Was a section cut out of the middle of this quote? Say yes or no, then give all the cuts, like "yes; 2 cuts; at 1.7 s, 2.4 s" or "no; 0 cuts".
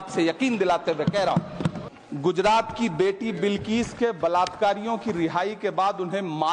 yes; 1 cut; at 1.8 s